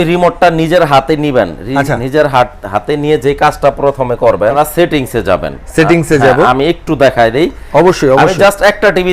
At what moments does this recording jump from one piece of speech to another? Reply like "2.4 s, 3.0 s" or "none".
4.5 s